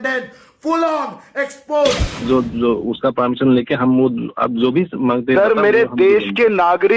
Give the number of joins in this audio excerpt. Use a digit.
1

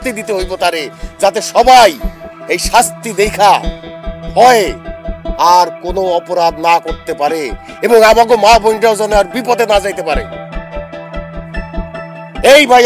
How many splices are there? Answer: 0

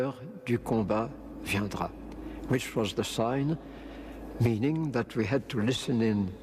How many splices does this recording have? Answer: 1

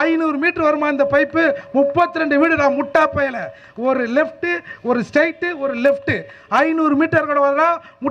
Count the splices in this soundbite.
0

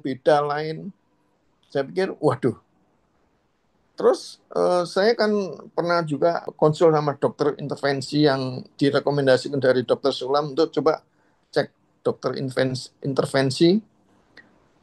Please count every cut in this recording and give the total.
1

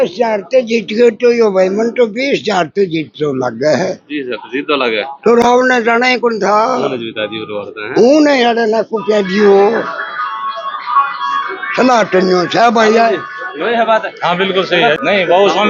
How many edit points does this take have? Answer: 0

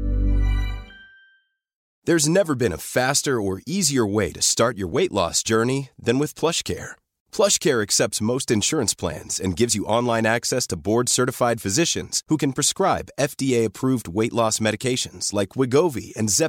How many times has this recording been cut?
1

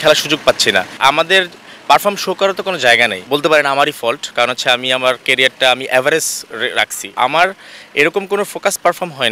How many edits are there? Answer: 3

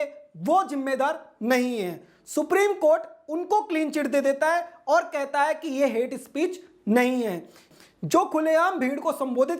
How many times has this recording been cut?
1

